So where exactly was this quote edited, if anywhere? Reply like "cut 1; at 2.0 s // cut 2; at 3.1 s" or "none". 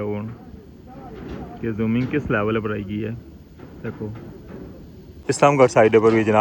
cut 1; at 5.1 s